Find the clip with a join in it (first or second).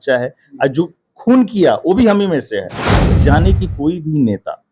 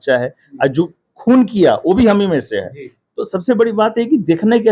first